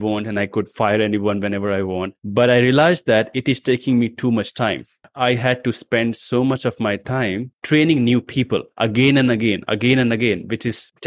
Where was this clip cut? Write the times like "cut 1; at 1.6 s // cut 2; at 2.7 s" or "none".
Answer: none